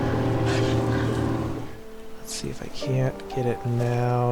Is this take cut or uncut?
cut